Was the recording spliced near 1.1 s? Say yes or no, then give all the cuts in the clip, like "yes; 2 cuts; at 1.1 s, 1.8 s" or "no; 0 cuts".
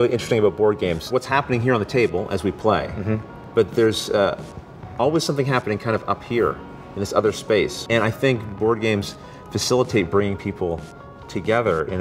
yes; 3 cuts; at 1.1 s, 3.4 s, 7.8 s